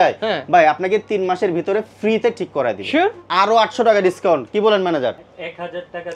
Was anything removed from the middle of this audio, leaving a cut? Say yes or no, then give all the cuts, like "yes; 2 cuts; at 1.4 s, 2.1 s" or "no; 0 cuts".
yes; 2 cuts; at 3.2 s, 5.3 s